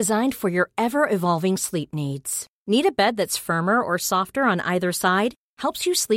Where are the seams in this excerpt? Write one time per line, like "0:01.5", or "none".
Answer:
none